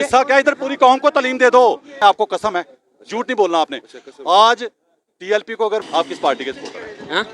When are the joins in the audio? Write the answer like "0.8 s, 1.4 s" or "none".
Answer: 2.0 s, 5.8 s